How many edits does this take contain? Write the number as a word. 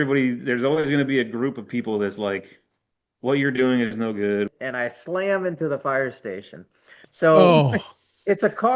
one